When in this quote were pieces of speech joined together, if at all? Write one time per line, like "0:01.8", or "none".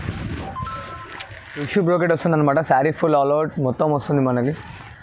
0:01.7